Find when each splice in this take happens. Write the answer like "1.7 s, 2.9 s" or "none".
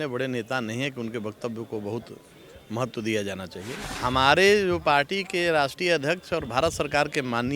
3.8 s